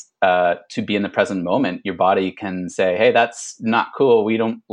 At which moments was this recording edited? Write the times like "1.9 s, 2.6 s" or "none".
none